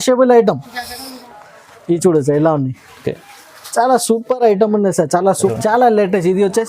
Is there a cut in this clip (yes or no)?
yes